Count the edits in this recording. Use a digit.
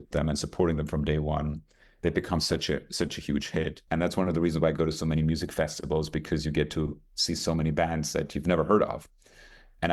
1